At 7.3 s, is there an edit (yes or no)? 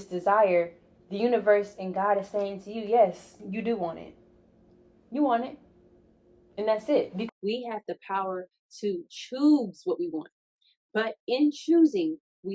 yes